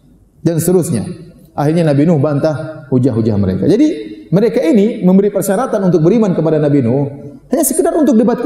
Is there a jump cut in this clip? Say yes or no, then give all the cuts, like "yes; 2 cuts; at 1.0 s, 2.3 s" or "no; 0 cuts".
no; 0 cuts